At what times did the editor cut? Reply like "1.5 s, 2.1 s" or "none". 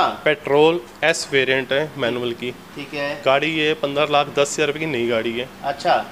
none